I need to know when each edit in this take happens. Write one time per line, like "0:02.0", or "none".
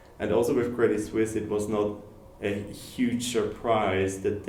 none